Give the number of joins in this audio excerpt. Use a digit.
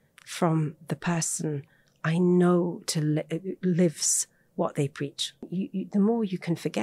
1